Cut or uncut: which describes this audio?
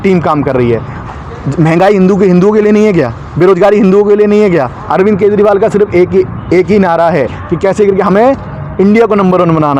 cut